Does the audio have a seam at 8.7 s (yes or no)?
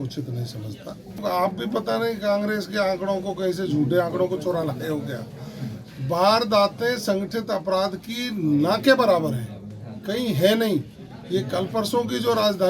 no